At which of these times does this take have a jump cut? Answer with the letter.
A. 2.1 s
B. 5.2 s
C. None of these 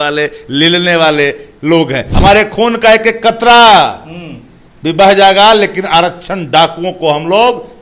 A